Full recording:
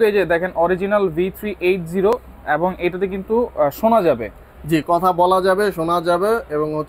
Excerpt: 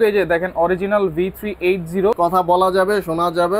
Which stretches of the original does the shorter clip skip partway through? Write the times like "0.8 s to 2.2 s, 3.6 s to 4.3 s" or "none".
2.2 s to 4.9 s